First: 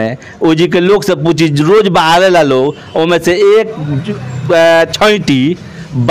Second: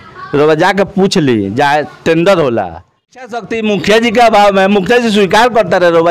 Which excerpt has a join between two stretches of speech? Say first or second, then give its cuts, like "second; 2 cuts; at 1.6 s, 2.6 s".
second; 1 cut; at 3.4 s